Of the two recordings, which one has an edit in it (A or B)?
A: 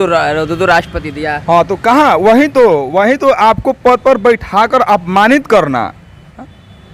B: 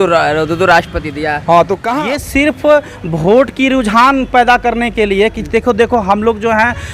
B